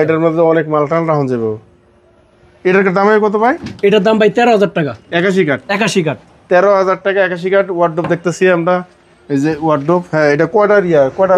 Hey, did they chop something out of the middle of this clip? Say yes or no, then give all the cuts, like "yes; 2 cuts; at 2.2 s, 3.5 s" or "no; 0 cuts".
no; 0 cuts